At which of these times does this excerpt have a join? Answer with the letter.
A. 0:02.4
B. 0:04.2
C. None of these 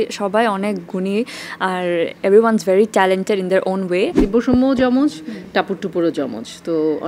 B